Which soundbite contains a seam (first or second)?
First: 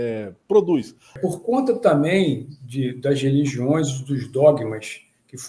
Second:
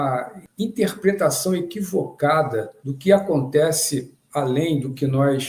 first